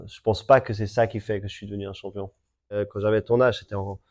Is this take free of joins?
no; 1 cut; at 2.8 s

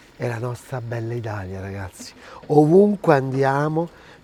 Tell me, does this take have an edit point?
no; 0 cuts

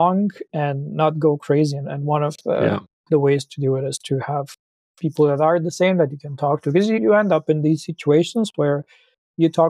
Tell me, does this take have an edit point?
no; 0 cuts

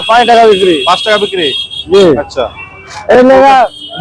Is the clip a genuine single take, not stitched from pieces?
yes; 0 cuts

